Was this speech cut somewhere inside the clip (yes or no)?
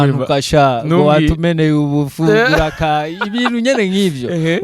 no